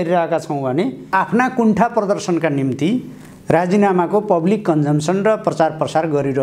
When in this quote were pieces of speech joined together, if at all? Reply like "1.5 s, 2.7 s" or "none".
1.1 s